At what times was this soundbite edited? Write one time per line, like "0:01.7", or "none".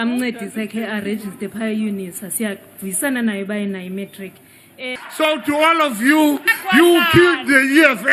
0:04.9

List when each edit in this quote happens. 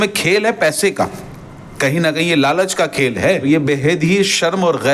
0:03.4

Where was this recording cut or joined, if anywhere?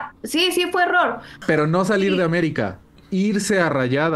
0:01.3

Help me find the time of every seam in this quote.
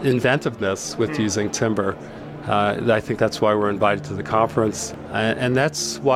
0:04.9

